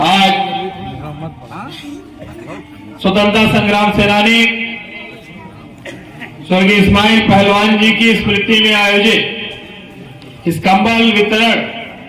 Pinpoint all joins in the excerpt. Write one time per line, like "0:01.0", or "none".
none